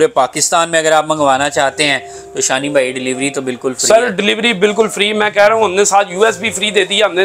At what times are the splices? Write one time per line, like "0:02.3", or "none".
none